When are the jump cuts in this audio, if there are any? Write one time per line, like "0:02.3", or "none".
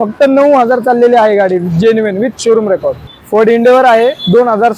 0:03.1

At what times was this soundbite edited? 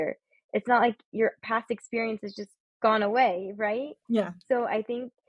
none

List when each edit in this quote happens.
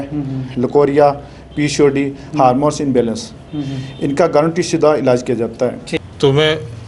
0:05.9

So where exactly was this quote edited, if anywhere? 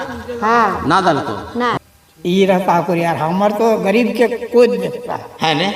0:01.7

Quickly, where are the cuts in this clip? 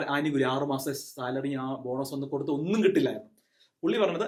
none

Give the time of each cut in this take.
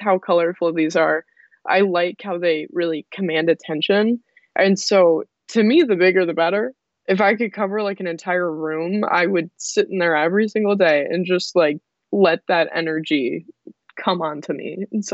0:06.8

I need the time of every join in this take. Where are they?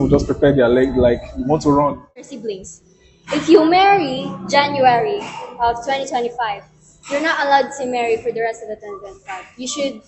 0:02.2

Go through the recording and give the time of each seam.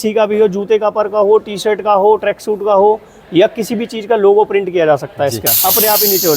0:05.5

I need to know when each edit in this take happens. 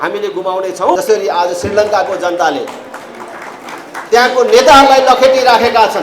0:01.0

